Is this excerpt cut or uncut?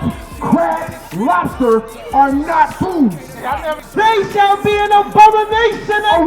cut